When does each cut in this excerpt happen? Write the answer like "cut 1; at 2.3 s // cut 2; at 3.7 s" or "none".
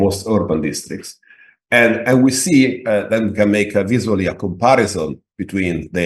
none